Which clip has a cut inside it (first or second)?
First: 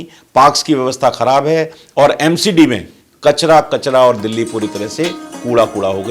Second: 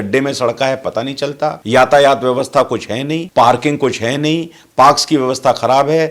second